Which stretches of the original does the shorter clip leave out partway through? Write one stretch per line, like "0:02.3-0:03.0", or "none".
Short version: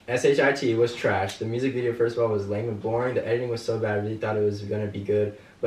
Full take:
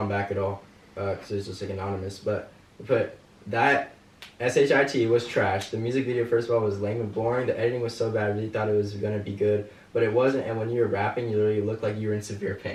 none